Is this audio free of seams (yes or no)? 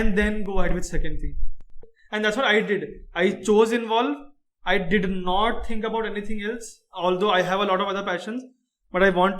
no